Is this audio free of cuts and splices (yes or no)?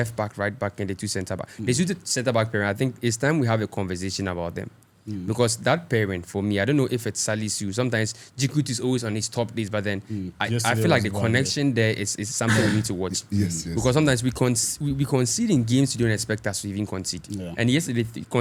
yes